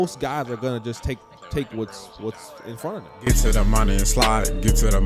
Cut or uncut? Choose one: cut